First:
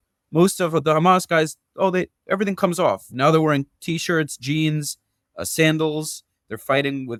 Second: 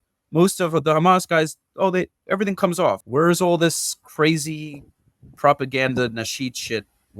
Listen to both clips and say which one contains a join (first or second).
second